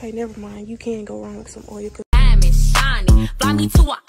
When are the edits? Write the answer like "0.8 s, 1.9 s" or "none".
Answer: 2.0 s